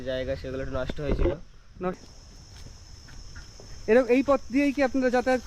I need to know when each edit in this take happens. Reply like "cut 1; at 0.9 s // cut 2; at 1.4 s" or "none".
cut 1; at 2.0 s